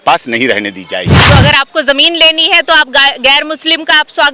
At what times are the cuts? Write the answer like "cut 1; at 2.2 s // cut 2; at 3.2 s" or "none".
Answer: cut 1; at 1.2 s

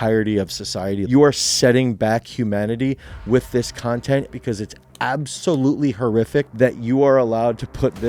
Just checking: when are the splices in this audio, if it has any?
cut 1; at 1.0 s // cut 2; at 4.3 s // cut 3; at 6.5 s

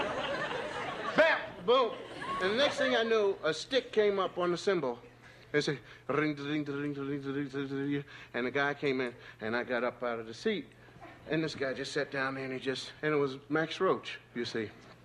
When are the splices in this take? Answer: cut 1; at 9.2 s

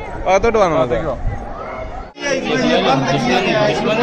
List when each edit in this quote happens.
cut 1; at 2.2 s

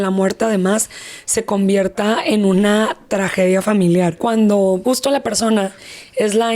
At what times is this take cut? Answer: cut 1; at 4.2 s // cut 2; at 4.8 s

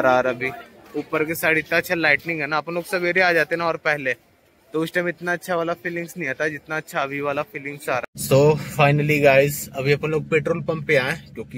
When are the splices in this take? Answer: cut 1; at 8.0 s

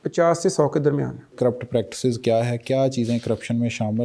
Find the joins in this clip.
cut 1; at 1.3 s

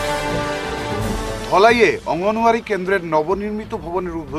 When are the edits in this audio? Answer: cut 1; at 1.1 s

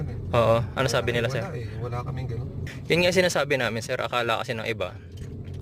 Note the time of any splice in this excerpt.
cut 1; at 2.6 s

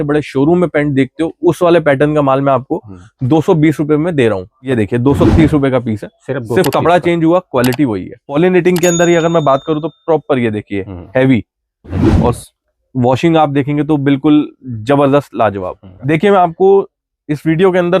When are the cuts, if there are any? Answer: cut 1; at 4.6 s // cut 2; at 8.3 s // cut 3; at 16.0 s

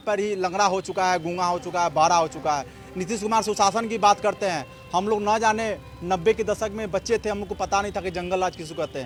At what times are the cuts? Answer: none

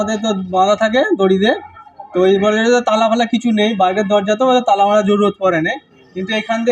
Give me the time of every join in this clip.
none

